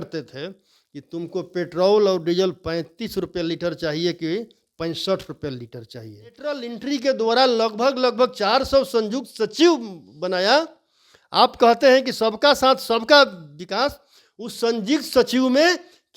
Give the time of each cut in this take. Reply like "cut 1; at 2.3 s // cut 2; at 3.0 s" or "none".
cut 1; at 6.7 s

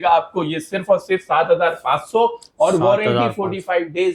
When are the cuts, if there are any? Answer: none

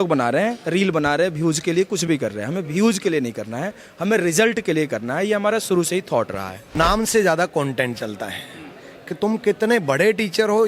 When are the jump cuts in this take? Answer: cut 1; at 6.7 s

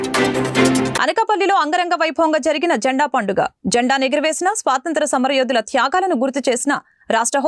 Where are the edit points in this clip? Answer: none

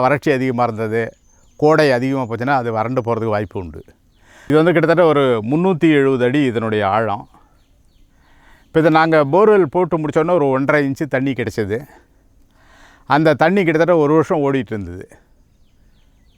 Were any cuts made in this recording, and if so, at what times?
cut 1; at 4.5 s

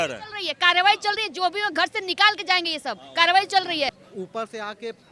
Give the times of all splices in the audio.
cut 1; at 3.9 s

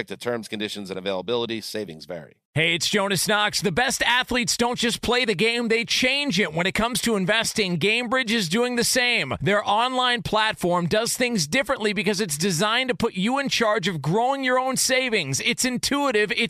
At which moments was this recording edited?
cut 1; at 2.3 s

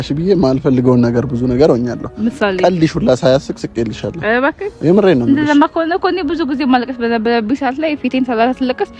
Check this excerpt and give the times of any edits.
none

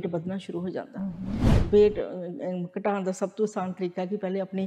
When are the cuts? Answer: cut 1; at 1.5 s

